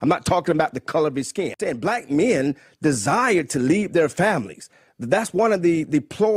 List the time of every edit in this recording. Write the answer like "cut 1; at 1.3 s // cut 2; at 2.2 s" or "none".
cut 1; at 1.5 s